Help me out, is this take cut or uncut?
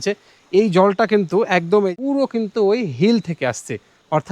cut